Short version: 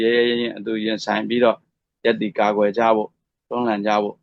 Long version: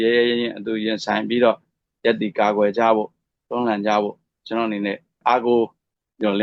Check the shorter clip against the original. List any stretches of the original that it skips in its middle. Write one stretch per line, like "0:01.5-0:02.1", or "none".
none